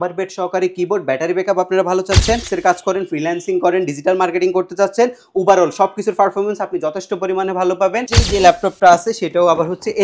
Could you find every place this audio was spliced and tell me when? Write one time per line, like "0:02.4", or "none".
0:02.5
0:08.1